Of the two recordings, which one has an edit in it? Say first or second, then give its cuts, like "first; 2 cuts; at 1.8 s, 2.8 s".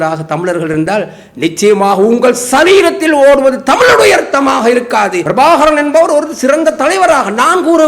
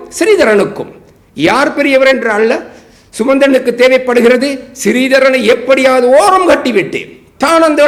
first; 1 cut; at 5.2 s